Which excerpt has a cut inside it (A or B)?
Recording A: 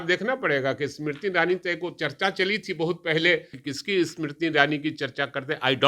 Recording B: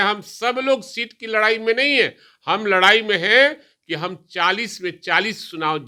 A